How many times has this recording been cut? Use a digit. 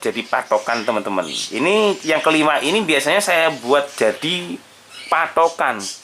1